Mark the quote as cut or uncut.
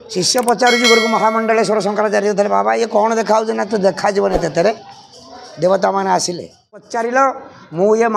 cut